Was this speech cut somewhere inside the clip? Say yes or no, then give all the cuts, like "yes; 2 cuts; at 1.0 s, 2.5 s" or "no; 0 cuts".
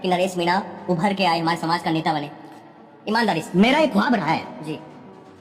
no; 0 cuts